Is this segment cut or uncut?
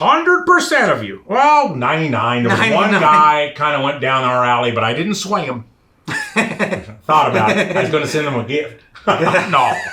uncut